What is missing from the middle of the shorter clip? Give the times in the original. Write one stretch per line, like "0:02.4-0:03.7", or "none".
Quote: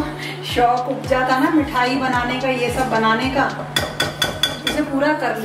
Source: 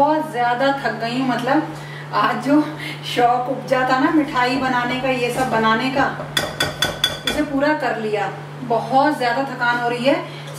none